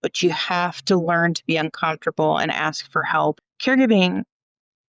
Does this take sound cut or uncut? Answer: cut